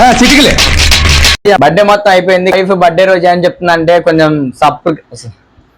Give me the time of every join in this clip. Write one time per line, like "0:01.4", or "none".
0:01.6